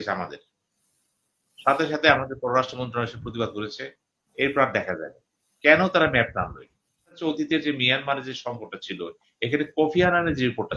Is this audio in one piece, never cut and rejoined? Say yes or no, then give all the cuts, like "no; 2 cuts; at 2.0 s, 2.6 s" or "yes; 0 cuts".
no; 1 cut; at 7.2 s